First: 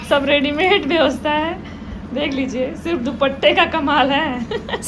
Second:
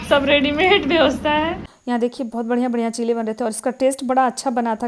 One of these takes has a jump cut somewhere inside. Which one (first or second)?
second